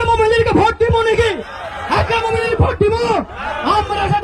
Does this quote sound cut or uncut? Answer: uncut